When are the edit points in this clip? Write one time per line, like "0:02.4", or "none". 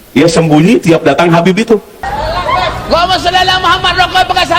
0:02.0